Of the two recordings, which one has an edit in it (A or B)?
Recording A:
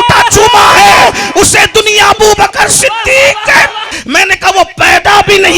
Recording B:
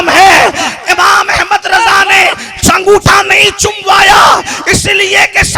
A